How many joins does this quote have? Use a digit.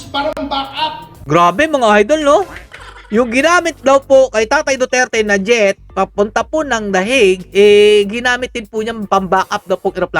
0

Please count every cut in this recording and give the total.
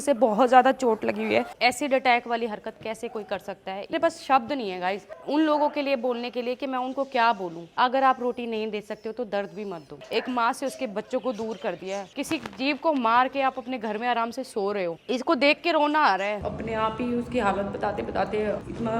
7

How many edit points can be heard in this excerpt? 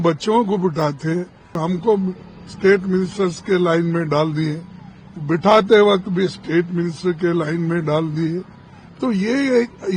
1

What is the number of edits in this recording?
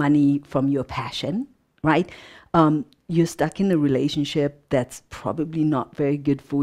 0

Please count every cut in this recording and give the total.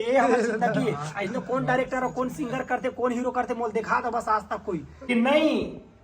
1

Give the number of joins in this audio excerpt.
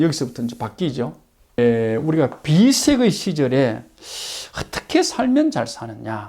1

